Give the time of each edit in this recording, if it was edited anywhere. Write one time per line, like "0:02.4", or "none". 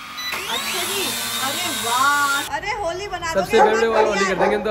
0:02.4

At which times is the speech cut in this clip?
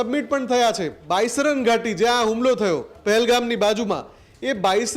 0:01.0

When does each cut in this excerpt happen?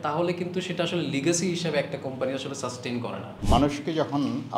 0:03.3

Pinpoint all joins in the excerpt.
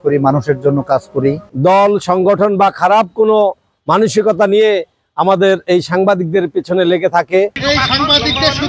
0:01.5
0:07.6

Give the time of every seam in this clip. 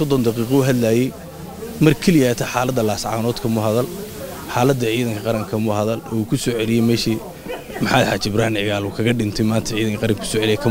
none

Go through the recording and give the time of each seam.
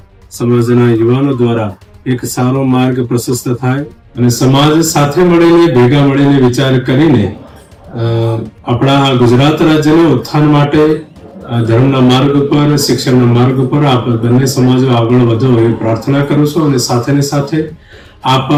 none

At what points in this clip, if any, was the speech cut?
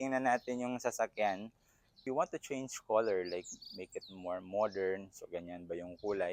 0:02.0

